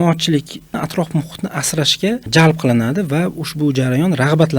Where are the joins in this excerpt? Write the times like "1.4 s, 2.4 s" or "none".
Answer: 0.8 s, 2.3 s